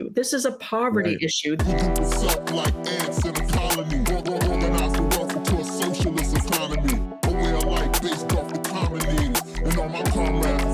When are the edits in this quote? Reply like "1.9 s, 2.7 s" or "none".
1.6 s